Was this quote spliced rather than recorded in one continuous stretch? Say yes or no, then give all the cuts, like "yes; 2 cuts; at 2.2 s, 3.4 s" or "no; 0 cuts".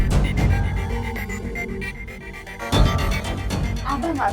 no; 0 cuts